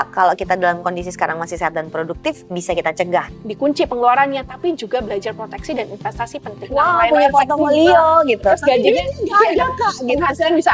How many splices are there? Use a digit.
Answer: 2